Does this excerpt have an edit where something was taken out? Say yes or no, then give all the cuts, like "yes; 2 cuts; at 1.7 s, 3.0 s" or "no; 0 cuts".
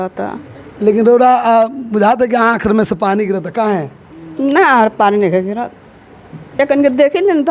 no; 0 cuts